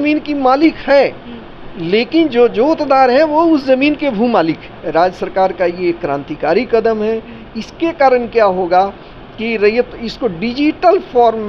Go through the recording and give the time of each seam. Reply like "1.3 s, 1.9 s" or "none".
4.7 s